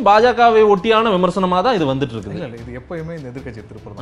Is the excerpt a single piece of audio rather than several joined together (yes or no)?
yes